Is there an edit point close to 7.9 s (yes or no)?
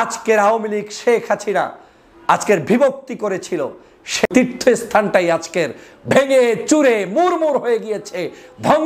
no